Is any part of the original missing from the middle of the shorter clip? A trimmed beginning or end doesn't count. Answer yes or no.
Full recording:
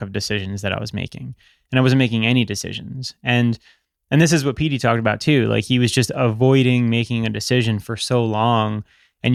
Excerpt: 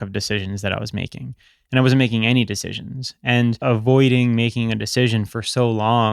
yes